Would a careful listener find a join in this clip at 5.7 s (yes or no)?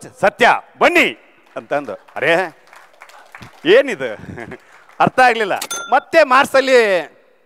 yes